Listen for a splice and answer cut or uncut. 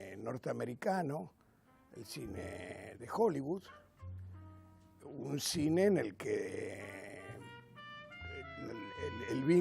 cut